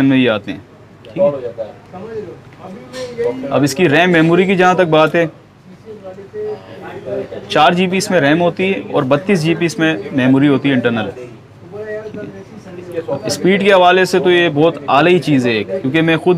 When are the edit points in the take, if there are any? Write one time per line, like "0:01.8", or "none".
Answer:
none